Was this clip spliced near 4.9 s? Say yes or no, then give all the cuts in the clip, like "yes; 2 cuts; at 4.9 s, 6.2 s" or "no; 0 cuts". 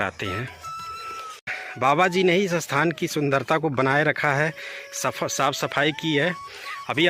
no; 1 cut; at 1.6 s